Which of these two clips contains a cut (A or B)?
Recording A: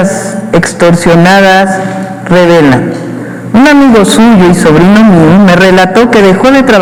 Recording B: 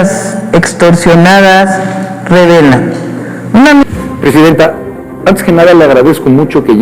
B